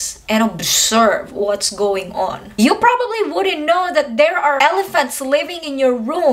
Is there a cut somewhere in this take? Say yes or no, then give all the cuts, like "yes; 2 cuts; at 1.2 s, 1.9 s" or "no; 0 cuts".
yes; 2 cuts; at 2.4 s, 4.6 s